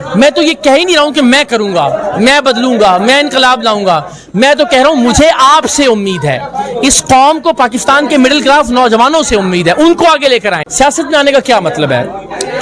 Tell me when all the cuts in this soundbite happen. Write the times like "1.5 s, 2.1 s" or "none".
10.6 s

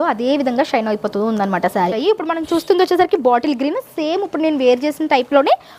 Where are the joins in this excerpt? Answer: 1.9 s

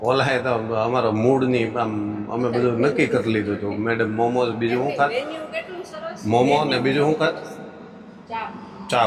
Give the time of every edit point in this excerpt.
none

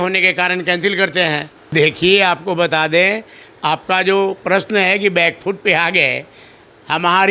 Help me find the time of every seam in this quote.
1.7 s

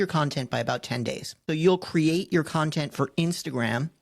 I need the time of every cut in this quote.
1.3 s

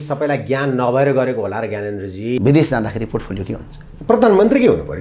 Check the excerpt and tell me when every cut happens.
2.4 s

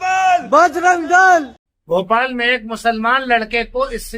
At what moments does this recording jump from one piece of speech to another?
1.5 s

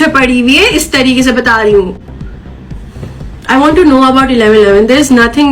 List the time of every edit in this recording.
none

